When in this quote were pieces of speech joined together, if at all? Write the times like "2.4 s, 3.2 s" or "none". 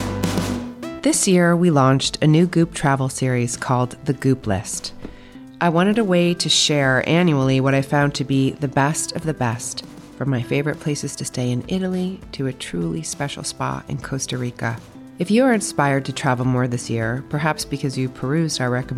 0.9 s